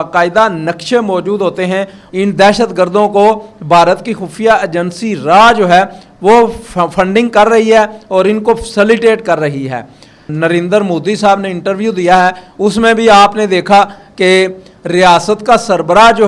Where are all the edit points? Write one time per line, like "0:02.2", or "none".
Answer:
0:02.0
0:10.2